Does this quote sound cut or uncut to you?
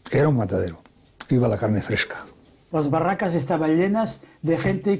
cut